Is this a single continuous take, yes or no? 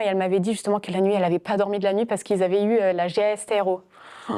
yes